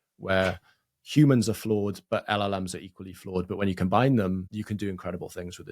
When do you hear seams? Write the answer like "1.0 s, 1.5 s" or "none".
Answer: 4.5 s